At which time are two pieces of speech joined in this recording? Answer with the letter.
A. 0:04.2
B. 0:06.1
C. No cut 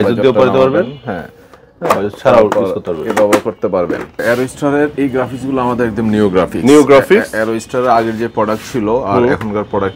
A